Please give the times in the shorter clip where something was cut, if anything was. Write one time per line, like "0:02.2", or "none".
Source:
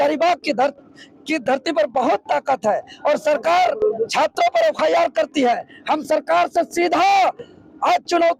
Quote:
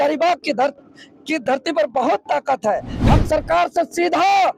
0:02.9